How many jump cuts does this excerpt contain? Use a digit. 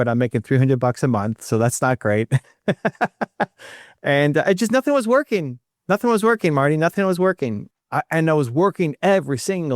1